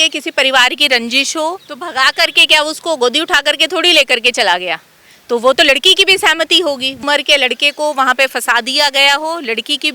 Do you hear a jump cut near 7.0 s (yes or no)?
yes